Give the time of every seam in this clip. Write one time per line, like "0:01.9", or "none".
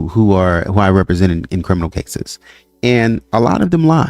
none